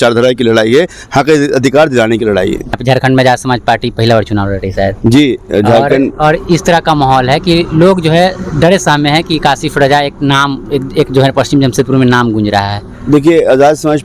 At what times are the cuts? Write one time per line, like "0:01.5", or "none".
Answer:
0:02.8